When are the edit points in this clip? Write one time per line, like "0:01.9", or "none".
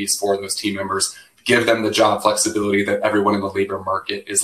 none